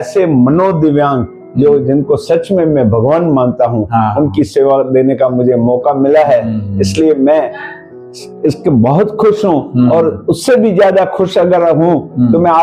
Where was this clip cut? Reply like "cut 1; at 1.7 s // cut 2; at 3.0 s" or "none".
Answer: none